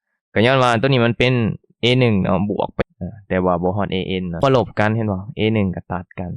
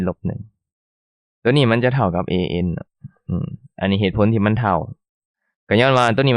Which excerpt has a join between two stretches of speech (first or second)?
first